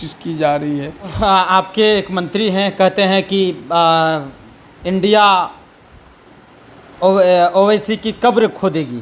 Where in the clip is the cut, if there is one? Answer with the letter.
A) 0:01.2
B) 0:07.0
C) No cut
A